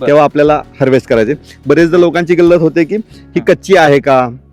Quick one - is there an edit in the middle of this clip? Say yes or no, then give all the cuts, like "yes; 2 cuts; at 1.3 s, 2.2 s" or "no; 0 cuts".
no; 0 cuts